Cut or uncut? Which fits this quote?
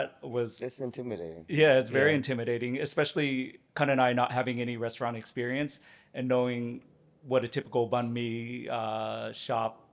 uncut